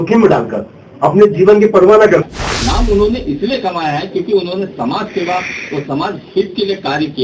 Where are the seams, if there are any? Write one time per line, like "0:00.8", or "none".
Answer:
0:02.2